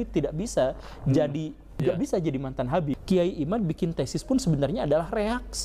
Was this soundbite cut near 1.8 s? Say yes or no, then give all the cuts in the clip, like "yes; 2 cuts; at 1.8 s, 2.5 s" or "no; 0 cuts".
yes; 2 cuts; at 1.8 s, 3.0 s